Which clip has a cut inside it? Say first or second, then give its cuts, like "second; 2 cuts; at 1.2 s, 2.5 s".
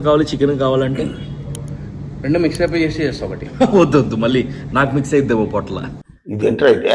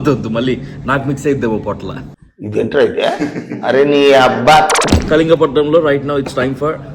second; 1 cut; at 4.9 s